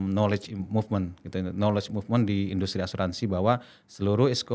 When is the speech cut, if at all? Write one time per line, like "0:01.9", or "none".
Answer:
none